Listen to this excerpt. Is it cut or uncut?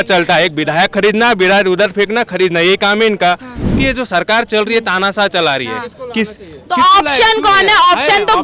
cut